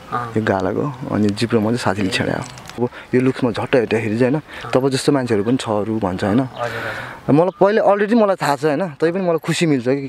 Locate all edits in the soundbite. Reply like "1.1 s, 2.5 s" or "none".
2.8 s